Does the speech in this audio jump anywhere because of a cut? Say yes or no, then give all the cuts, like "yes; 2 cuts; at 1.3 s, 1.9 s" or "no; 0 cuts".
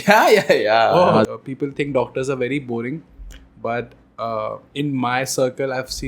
yes; 1 cut; at 1.3 s